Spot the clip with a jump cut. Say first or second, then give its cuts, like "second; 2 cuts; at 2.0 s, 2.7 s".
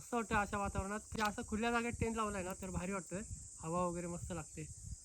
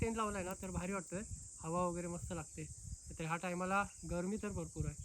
first; 1 cut; at 1.1 s